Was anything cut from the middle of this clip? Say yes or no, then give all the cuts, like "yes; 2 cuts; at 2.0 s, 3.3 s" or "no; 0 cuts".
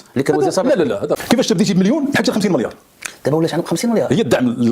yes; 1 cut; at 1.2 s